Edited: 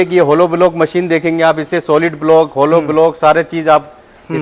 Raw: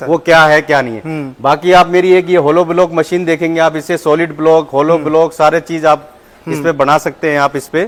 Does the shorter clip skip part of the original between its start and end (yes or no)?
no